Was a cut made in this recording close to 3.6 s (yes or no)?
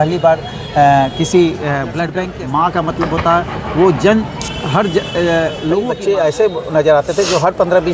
no